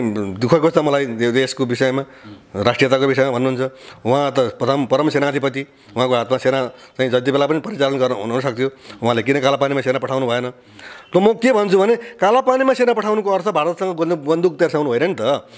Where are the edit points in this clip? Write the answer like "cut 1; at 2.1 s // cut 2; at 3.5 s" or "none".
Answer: none

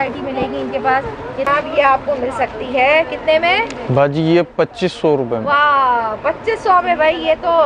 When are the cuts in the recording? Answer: cut 1; at 1.5 s

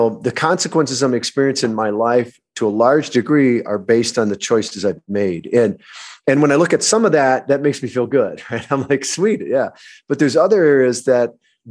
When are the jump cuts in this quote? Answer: none

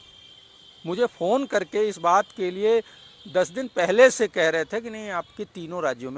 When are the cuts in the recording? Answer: none

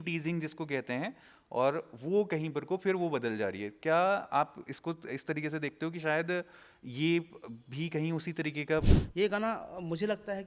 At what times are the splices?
cut 1; at 9.0 s

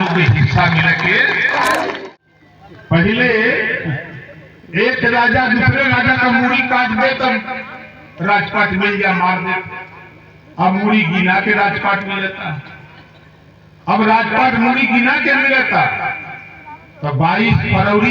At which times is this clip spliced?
cut 1; at 2.0 s

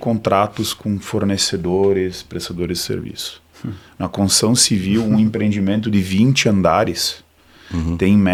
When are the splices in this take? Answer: none

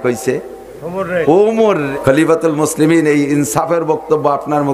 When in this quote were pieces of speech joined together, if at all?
cut 1; at 1.9 s

